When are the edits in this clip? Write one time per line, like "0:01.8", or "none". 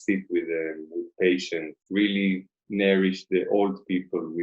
0:01.8